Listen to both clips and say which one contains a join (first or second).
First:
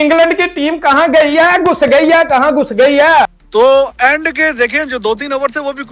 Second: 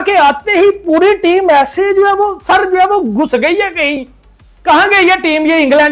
first